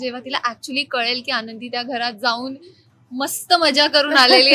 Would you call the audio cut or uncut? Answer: uncut